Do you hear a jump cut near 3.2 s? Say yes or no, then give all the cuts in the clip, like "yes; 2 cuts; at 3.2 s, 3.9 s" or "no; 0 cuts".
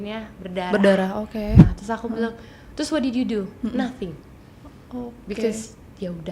no; 1 cut; at 1.7 s